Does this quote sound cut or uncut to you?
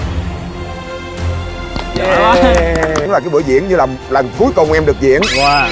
cut